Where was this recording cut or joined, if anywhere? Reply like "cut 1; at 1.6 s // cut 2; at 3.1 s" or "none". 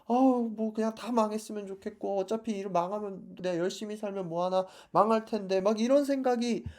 none